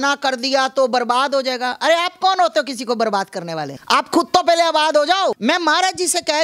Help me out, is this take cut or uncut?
cut